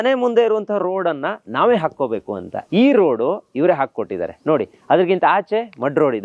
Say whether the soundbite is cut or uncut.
cut